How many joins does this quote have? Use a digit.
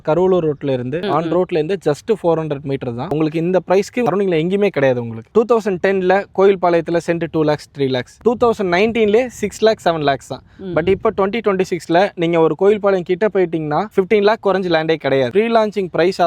3